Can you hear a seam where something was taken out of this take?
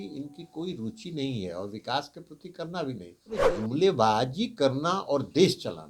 yes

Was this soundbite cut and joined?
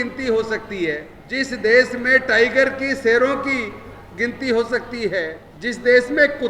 yes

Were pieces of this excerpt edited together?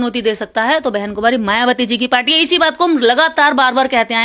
no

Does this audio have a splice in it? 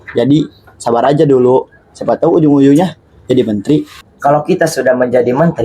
yes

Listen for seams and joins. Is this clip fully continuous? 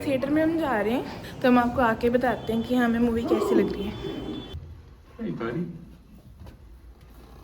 no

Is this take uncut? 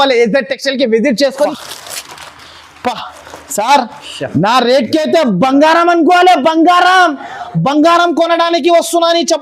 no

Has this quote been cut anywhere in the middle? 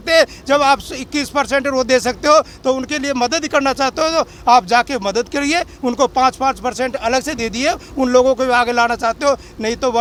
no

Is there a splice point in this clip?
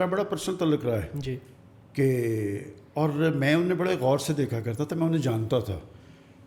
no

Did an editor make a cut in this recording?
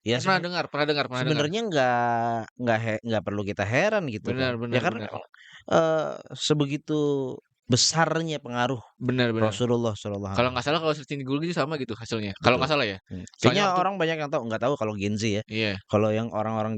no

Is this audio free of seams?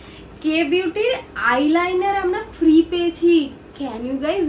yes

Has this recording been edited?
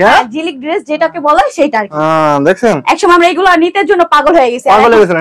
no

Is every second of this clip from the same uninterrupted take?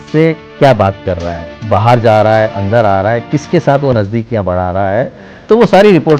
yes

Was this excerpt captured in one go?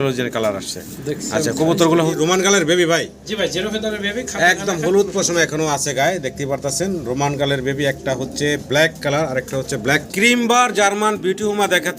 no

